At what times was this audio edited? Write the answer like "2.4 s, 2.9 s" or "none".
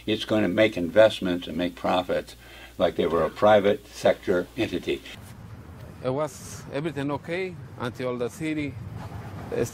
5.1 s